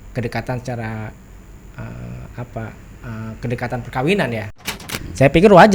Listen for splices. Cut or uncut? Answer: cut